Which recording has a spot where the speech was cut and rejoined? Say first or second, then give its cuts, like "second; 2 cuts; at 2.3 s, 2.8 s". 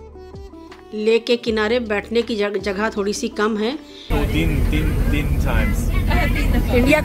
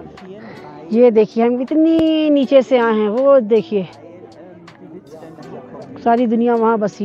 first; 1 cut; at 4.1 s